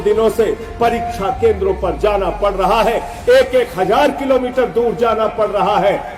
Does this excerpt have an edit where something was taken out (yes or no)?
no